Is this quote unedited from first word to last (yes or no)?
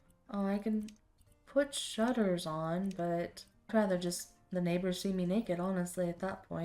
no